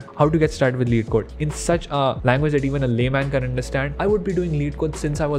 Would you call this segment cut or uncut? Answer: cut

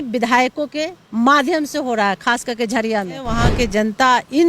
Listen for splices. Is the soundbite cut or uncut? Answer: cut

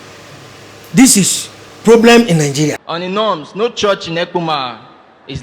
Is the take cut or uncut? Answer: cut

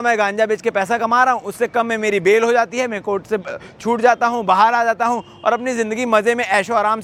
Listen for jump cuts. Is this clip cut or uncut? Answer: uncut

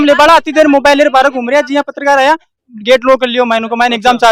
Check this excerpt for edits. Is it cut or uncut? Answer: uncut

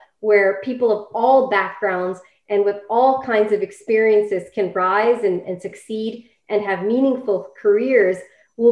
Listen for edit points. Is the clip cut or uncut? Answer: uncut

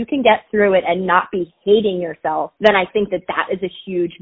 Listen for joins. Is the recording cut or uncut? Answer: cut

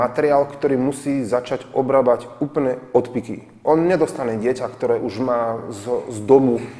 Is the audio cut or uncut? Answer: uncut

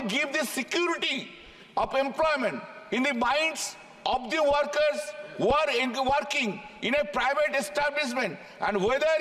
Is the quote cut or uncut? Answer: uncut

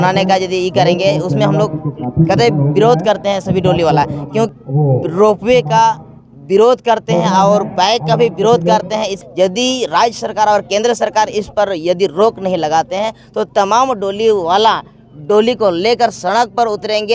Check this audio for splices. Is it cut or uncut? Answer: cut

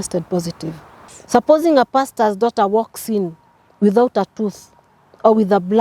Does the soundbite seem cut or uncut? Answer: cut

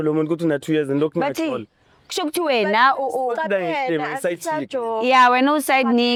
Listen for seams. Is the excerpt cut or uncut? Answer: uncut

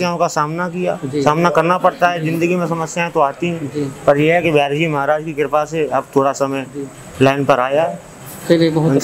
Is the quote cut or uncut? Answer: uncut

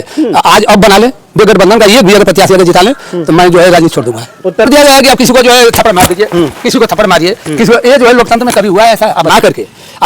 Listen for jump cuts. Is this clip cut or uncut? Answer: cut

